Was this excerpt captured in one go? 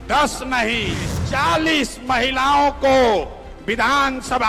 no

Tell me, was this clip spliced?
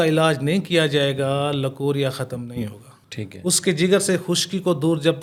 no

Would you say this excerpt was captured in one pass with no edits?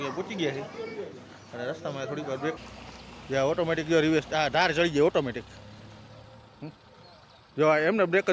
no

